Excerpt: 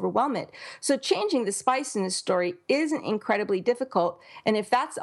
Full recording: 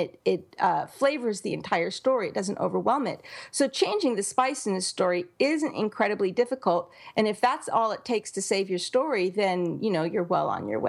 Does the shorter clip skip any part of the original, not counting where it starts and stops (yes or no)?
no